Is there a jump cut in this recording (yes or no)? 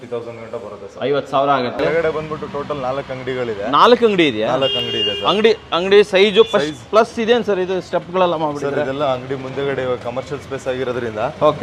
yes